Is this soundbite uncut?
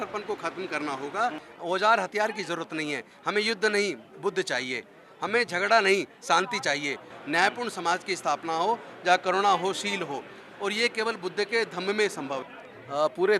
no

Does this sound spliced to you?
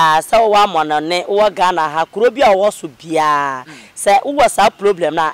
no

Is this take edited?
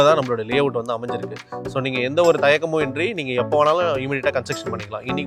no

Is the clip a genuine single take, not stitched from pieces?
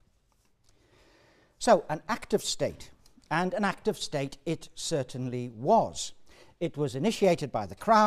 yes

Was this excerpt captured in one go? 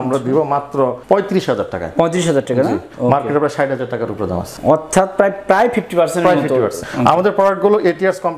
no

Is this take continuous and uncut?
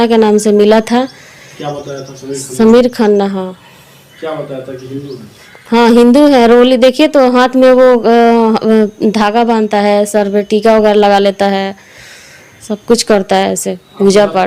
yes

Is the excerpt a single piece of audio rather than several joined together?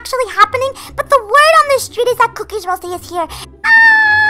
no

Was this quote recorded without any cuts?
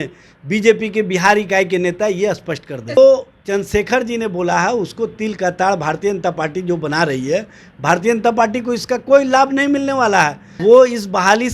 no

